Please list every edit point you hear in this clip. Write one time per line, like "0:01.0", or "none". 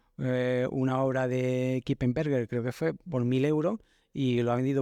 none